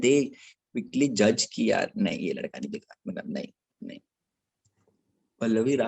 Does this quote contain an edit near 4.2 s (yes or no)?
yes